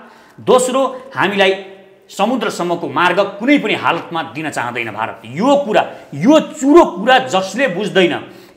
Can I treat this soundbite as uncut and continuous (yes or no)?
yes